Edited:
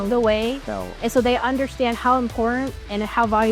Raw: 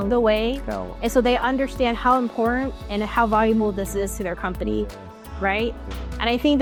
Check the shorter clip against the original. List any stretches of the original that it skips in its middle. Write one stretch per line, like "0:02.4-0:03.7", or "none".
none